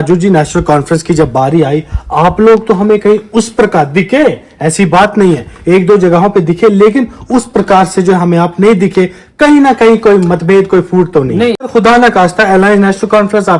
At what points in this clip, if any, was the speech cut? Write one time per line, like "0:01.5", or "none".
0:11.7